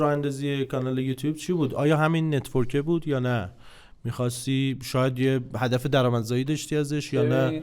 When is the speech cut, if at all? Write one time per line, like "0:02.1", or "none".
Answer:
none